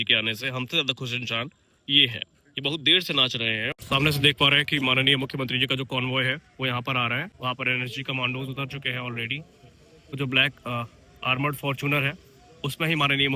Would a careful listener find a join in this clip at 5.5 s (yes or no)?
no